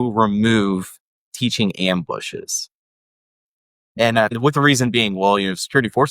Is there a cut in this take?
yes; 1 cut; at 4.3 s

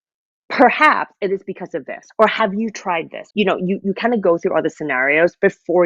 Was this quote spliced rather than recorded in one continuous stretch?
yes; 1 cut; at 3.2 s

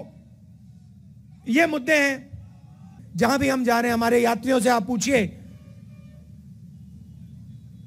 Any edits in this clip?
yes; 1 cut; at 3.0 s

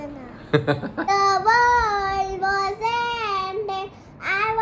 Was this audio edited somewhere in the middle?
yes; 1 cut; at 1.1 s

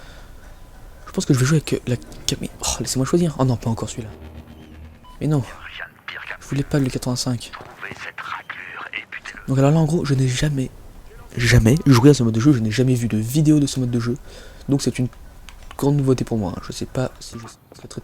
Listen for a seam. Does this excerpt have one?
yes; 1 cut; at 10.7 s

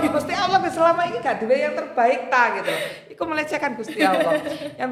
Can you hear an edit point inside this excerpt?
no; 0 cuts

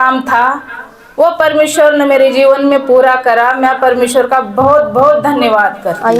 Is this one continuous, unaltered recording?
yes; 0 cuts

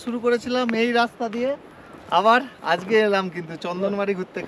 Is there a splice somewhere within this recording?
no; 0 cuts

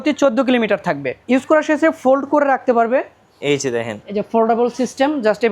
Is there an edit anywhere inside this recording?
yes; 1 cut; at 1.1 s

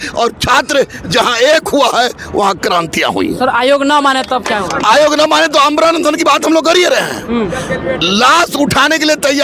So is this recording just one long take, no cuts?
yes; 0 cuts

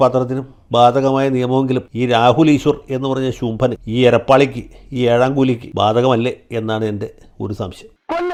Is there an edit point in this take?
no; 0 cuts

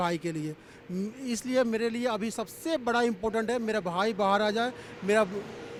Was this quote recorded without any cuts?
yes; 0 cuts

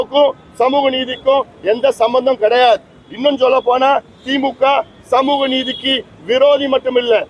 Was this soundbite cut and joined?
no; 0 cuts

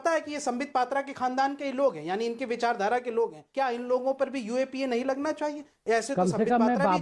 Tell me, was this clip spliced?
yes; 1 cut; at 3.4 s

